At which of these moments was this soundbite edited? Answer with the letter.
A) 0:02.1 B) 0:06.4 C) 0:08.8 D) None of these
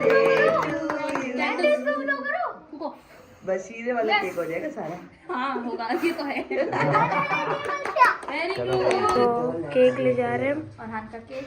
C